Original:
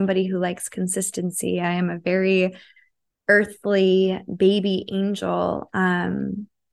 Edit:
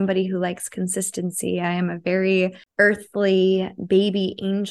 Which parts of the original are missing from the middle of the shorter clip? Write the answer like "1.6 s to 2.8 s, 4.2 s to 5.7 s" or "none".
2.6 s to 3.1 s